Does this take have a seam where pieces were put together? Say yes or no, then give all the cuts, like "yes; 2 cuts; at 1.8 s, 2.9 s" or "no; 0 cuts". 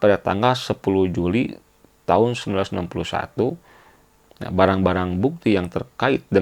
no; 0 cuts